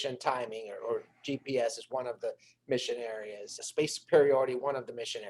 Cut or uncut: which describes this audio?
cut